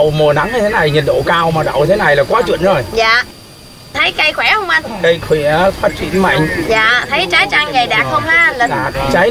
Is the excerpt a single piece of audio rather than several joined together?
yes; 0 cuts

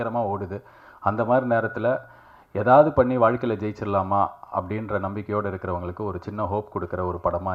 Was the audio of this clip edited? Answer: no; 0 cuts

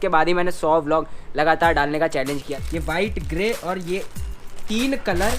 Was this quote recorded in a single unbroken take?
no; 1 cut; at 2.4 s

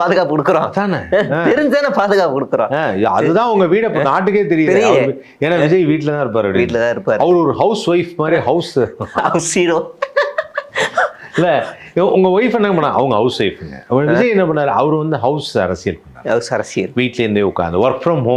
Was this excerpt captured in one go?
yes; 0 cuts

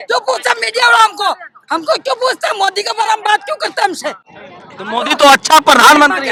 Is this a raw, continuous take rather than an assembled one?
yes; 0 cuts

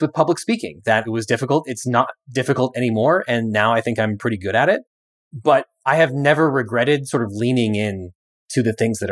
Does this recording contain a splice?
yes; 1 cut; at 1.1 s

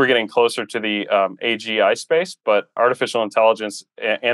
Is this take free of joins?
no; 1 cut; at 2.8 s

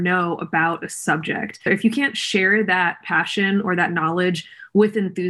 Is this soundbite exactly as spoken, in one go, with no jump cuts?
no; 1 cut; at 1.6 s

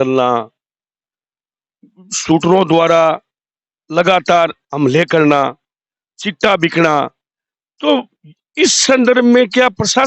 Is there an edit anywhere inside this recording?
no; 0 cuts

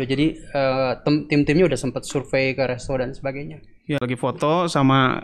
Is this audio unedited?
no; 1 cut; at 3.9 s

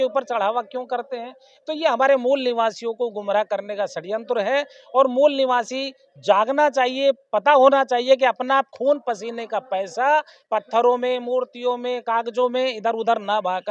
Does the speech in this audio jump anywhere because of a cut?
no; 0 cuts

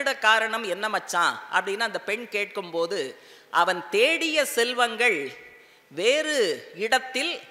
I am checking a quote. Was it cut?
no; 0 cuts

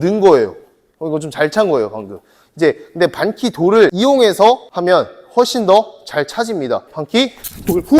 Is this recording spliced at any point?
yes; 3 cuts; at 3.9 s, 4.7 s, 6.9 s

